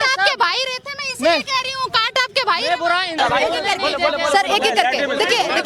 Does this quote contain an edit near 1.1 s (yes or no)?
no